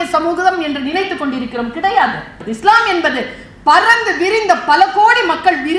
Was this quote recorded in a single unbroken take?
no; 1 cut; at 2.4 s

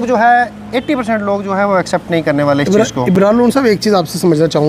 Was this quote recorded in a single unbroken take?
yes; 0 cuts

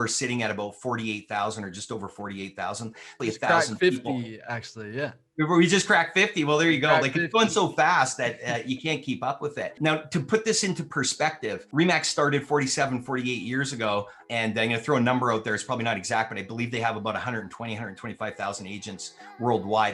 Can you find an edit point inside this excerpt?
yes; 4 cuts; at 3.2 s, 9.8 s, 11.6 s, 14.2 s

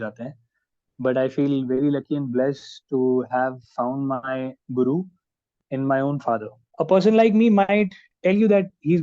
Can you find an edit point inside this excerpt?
yes; 1 cut; at 6.6 s

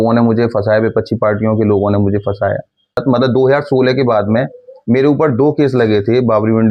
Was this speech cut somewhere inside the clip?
yes; 1 cut; at 3.0 s

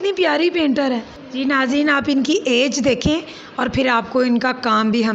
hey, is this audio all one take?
no; 1 cut; at 1.2 s

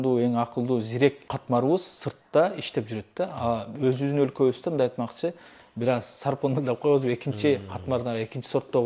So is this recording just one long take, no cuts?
yes; 0 cuts

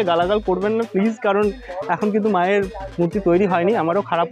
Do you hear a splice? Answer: no; 0 cuts

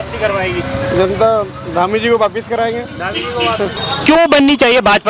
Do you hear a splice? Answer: yes; 1 cut; at 3.8 s

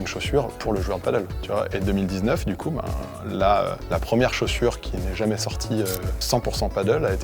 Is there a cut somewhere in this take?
no; 0 cuts

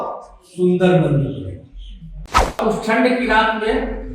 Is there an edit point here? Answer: yes; 1 cut; at 2.6 s

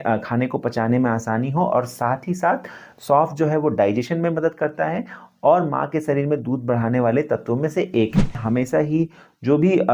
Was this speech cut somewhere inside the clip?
yes; 1 cut; at 8.4 s

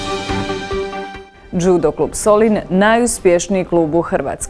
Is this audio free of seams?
no; 1 cut; at 1.0 s

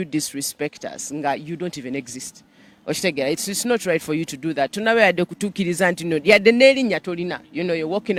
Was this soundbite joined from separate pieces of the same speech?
no; 0 cuts

